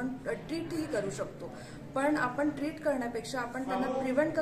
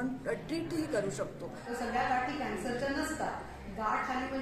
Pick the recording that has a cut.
second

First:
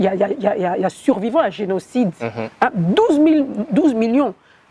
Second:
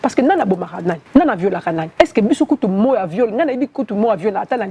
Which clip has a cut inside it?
second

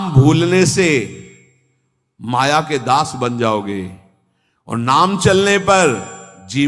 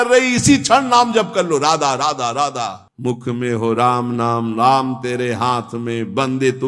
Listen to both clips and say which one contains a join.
second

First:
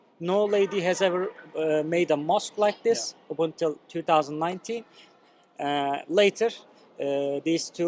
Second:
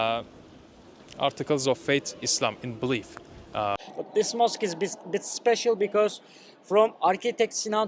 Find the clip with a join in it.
second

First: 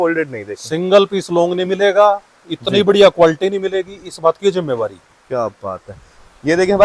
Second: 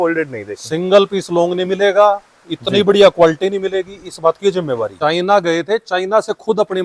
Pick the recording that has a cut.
second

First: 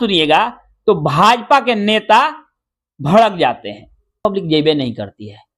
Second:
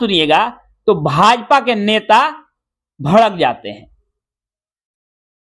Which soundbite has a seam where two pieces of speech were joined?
first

